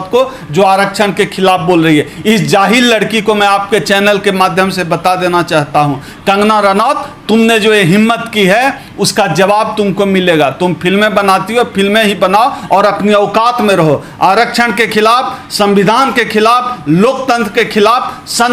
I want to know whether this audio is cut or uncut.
uncut